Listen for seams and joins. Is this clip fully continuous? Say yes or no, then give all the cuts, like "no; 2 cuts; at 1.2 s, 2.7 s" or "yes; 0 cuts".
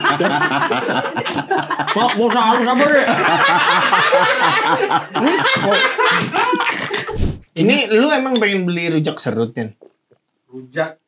no; 1 cut; at 7.1 s